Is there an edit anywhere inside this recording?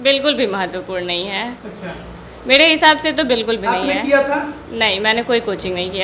no; 0 cuts

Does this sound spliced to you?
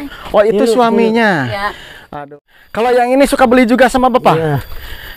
yes; 1 cut; at 2.1 s

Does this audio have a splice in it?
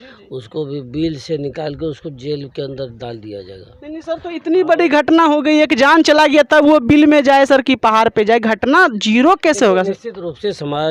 no; 0 cuts

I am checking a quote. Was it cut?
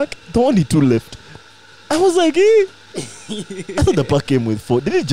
no; 0 cuts

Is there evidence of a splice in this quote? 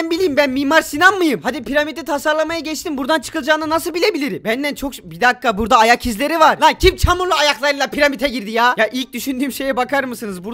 no; 0 cuts

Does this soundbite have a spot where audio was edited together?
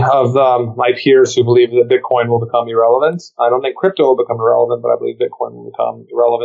no; 0 cuts

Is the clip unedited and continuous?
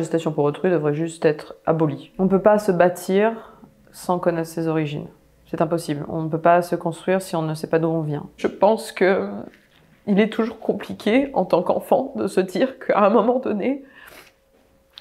no; 2 cuts; at 2.1 s, 8.3 s

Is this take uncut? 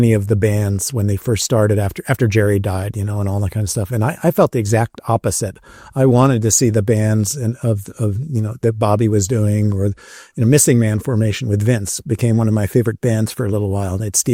yes; 0 cuts

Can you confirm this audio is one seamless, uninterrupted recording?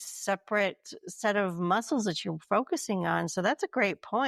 yes; 0 cuts

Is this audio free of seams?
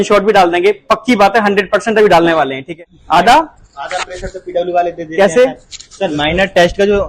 no; 1 cut; at 2.6 s

